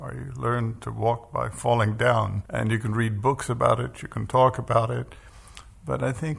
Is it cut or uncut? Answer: cut